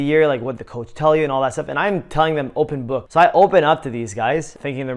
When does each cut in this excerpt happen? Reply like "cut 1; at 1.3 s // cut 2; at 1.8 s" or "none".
cut 1; at 3.0 s